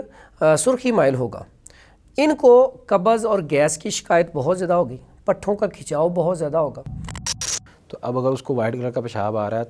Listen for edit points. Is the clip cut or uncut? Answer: cut